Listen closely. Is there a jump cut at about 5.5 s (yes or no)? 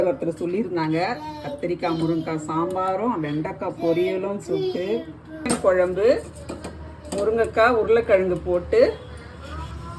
yes